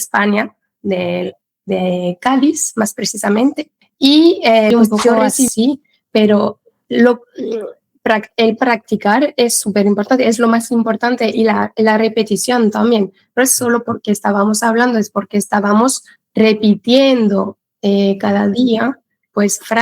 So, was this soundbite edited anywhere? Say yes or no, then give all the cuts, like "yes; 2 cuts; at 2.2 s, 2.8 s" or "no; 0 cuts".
yes; 1 cut; at 5.5 s